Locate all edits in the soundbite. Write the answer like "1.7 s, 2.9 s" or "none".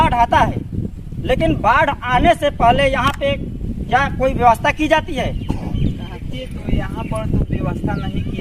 none